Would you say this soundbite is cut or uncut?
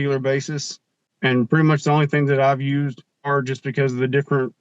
cut